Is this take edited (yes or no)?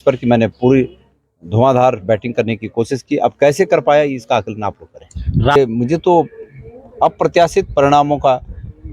yes